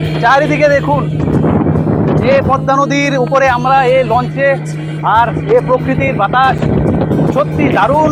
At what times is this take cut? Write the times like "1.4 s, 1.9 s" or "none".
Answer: none